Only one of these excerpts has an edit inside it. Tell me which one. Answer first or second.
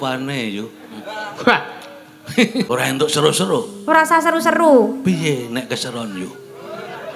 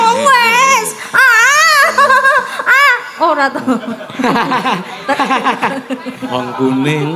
first